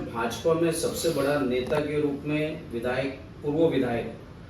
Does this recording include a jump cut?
no; 0 cuts

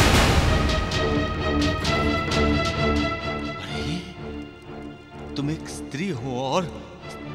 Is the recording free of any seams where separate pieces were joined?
yes; 0 cuts

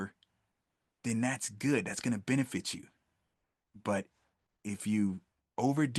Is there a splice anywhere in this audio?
no; 0 cuts

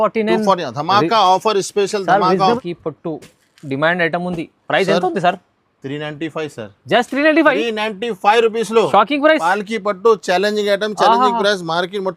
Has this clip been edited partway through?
yes; 1 cut; at 2.6 s

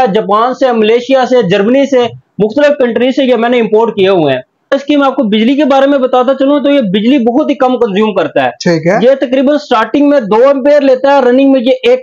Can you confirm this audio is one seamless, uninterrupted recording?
no; 1 cut; at 4.8 s

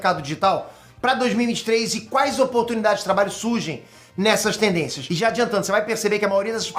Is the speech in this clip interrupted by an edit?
no; 0 cuts

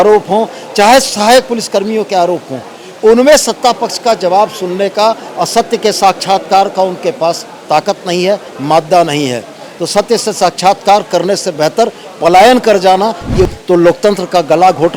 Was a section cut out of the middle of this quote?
yes; 1 cut; at 13.5 s

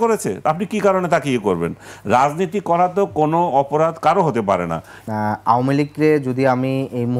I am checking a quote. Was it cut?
yes; 1 cut; at 5.0 s

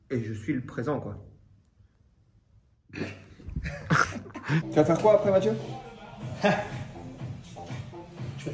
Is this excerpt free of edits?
no; 1 cut; at 4.6 s

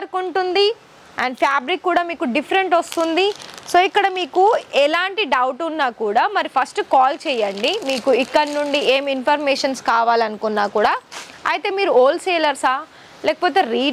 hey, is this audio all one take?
yes; 0 cuts

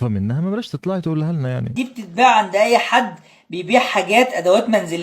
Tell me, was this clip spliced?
yes; 1 cut; at 1.7 s

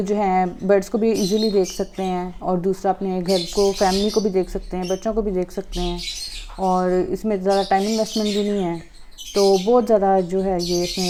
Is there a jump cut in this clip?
no; 0 cuts

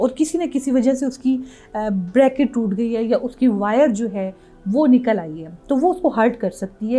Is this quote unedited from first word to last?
yes; 0 cuts

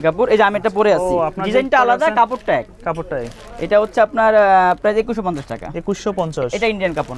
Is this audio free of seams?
yes; 0 cuts

